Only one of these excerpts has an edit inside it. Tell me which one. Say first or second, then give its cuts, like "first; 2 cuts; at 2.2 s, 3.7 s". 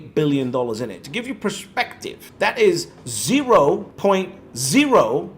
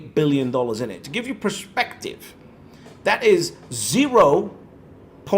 first; 2 cuts; at 2.2 s, 3.9 s